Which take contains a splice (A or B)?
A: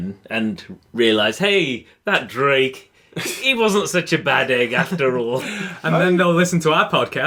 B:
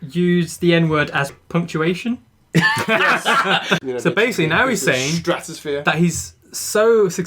B